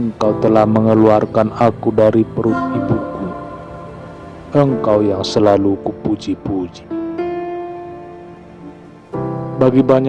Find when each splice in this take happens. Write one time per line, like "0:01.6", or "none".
0:03.0
0:04.5
0:06.7
0:09.3